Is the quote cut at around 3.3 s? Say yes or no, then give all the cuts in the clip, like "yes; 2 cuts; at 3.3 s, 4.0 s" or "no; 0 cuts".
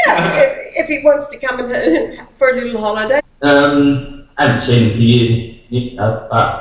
no; 0 cuts